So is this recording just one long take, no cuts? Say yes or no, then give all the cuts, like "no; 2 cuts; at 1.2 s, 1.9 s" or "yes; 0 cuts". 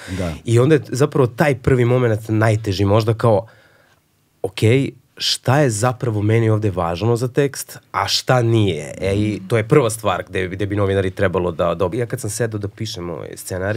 no; 1 cut; at 11.9 s